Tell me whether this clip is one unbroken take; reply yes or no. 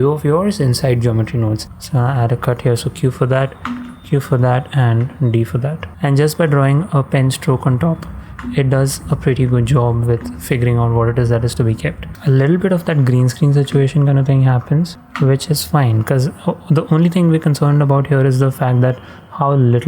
no